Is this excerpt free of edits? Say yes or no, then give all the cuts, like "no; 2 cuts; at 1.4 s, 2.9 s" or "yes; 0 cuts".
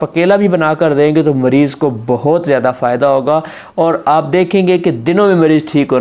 yes; 0 cuts